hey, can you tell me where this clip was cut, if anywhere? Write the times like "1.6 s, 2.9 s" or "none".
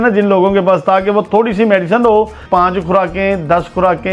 2.4 s